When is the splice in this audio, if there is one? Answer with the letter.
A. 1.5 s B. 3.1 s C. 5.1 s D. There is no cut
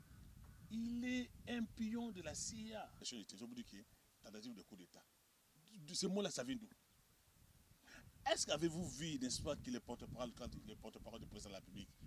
B